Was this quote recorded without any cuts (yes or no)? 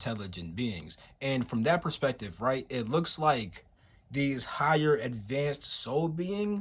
yes